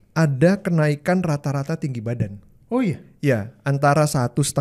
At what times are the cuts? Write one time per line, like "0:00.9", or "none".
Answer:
none